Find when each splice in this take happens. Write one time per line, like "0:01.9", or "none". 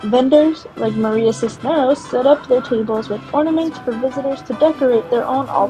none